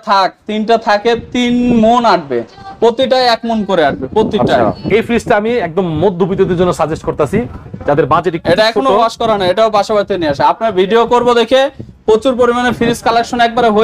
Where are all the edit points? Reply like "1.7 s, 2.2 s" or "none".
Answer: none